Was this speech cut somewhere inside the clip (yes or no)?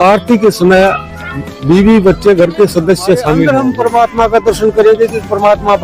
yes